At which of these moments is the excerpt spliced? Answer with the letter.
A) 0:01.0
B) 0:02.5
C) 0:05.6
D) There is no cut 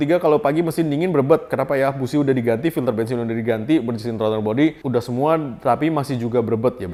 D